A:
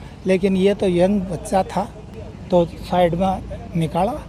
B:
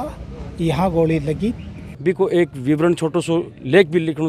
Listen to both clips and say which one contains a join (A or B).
B